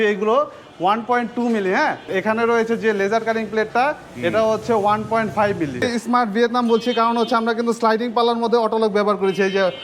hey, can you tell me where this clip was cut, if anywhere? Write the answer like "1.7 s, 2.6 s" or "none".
2.1 s, 5.8 s